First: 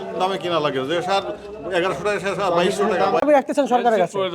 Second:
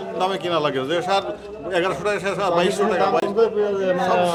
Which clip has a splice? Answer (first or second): first